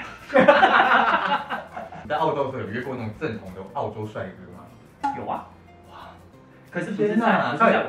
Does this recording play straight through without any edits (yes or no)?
yes